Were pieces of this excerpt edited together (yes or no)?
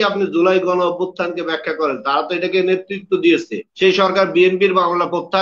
yes